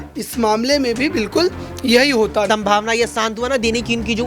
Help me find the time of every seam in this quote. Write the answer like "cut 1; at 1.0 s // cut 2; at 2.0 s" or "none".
cut 1; at 2.5 s

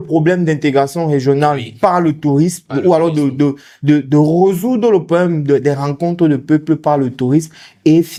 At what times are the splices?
none

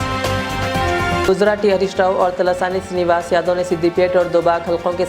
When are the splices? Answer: cut 1; at 1.2 s

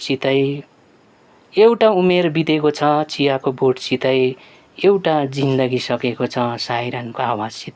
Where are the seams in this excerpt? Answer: none

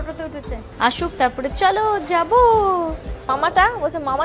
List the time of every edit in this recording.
cut 1; at 3.3 s

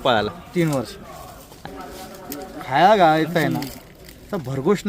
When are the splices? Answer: cut 1; at 1.5 s

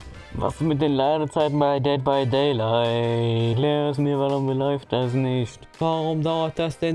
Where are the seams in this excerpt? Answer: cut 1; at 3.5 s // cut 2; at 5.7 s

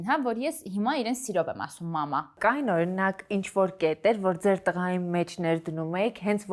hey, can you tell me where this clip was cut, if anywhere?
cut 1; at 2.3 s

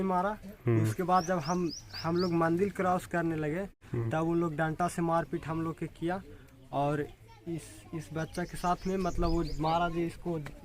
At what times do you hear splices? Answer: cut 1; at 3.8 s

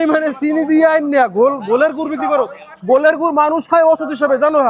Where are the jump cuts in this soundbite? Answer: none

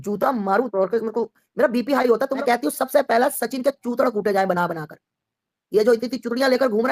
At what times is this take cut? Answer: cut 1; at 2.3 s

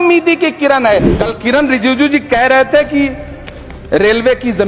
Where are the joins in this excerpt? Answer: cut 1; at 1.1 s

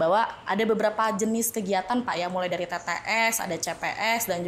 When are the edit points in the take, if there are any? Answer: none

